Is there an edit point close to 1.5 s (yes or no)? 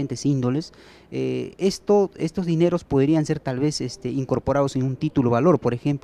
no